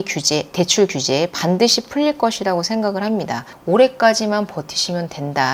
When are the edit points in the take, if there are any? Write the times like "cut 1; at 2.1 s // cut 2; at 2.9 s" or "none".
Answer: cut 1; at 3.5 s